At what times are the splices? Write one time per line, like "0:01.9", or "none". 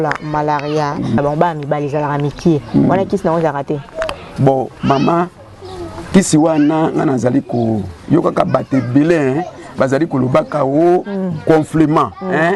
0:01.2